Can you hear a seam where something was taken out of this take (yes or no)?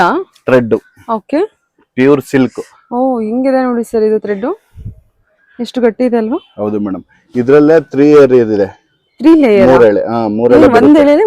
no